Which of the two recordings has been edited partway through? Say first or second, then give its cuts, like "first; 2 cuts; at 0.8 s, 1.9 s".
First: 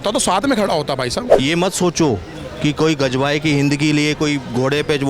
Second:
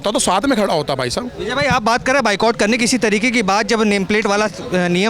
first; 1 cut; at 1.3 s